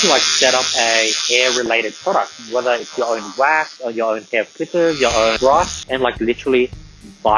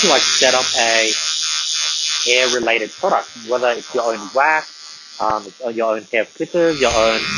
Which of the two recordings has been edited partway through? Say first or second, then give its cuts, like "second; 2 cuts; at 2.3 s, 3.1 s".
first; 3 cuts; at 1.2 s, 3.7 s, 5.5 s